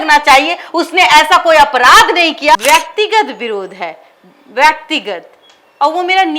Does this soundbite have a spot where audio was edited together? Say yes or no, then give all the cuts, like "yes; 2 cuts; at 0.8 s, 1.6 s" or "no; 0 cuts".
yes; 1 cut; at 2.6 s